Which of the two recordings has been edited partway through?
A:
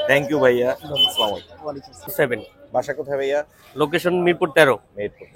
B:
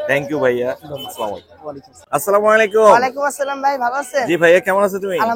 A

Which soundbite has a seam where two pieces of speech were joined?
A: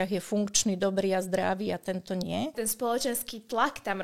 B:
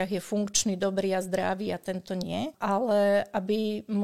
A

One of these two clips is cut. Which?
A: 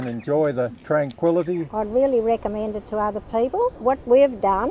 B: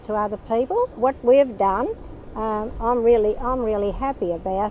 A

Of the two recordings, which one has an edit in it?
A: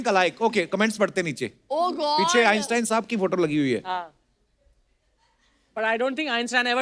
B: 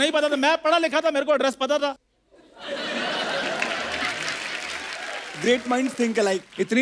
B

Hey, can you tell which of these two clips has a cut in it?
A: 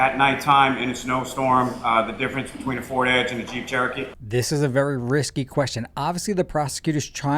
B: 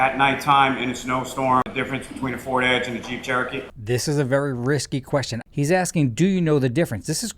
B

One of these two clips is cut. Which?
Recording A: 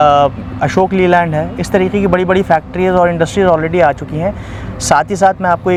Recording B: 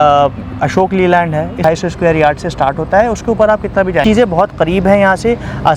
B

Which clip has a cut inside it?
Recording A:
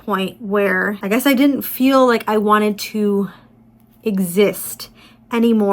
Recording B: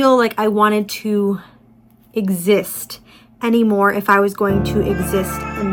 A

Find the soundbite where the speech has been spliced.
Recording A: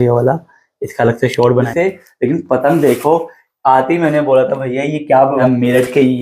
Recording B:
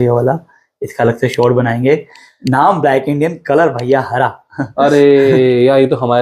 A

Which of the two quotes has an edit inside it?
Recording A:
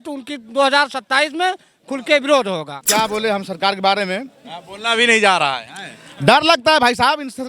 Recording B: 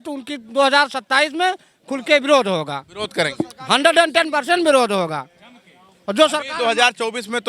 A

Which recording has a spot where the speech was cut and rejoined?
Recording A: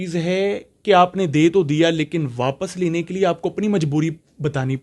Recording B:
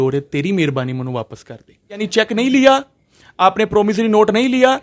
B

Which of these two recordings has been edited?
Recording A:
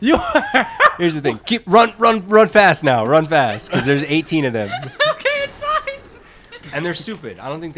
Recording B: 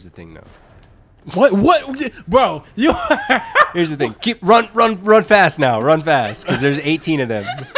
A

